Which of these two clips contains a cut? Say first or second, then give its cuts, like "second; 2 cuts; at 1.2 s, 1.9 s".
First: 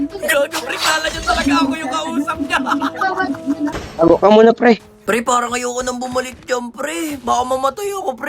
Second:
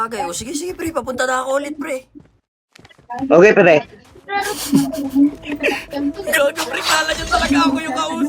first; 2 cuts; at 3.7 s, 4.9 s